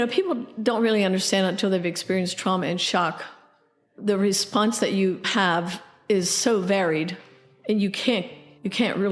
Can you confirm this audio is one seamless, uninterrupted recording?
yes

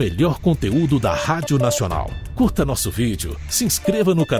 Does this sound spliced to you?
yes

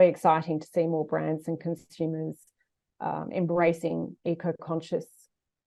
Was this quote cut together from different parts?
no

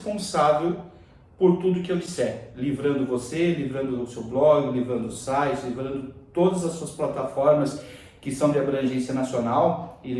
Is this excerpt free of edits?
yes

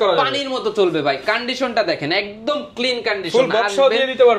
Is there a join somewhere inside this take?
no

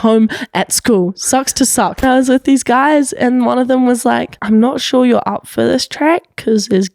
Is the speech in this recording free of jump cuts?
no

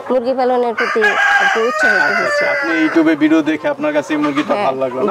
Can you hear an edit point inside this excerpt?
no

